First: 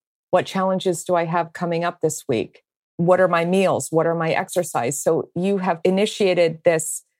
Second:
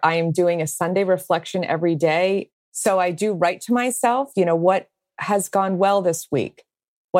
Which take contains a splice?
second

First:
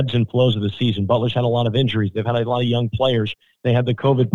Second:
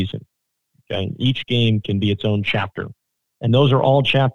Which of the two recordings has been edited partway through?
second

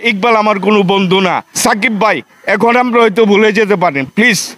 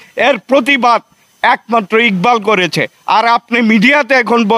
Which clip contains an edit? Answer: first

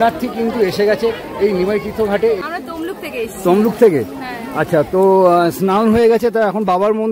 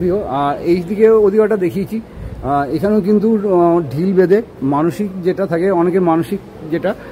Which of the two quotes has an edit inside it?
first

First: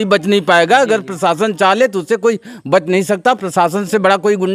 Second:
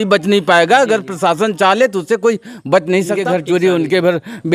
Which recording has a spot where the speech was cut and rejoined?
second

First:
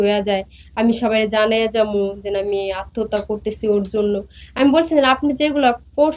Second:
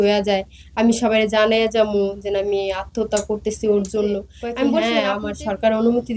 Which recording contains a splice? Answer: second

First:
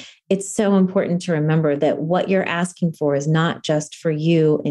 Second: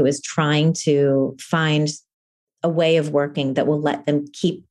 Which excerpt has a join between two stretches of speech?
first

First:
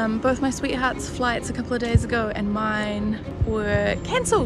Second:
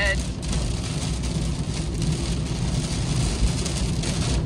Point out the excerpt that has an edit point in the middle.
first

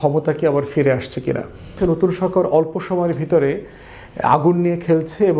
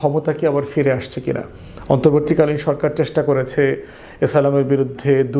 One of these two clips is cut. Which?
first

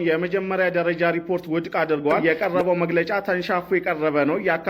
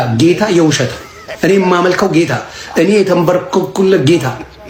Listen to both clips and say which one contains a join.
first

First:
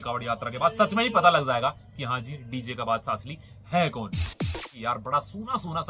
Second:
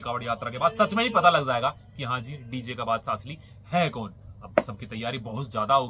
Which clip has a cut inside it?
first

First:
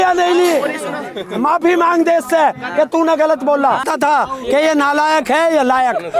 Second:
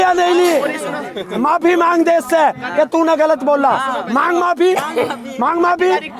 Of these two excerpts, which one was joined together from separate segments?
first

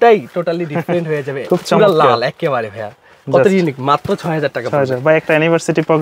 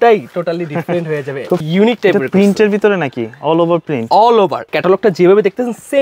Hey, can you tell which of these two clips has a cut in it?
second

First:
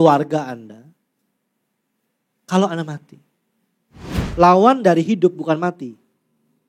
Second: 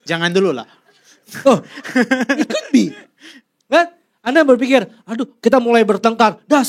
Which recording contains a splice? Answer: first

